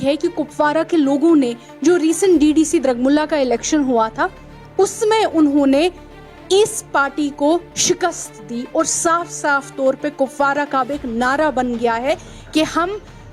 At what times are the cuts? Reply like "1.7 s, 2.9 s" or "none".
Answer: none